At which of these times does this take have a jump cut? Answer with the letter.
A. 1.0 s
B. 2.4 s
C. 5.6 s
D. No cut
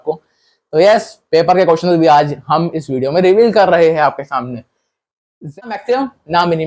C